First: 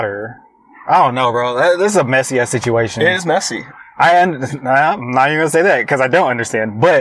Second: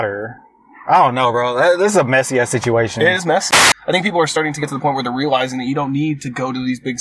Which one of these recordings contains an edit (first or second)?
second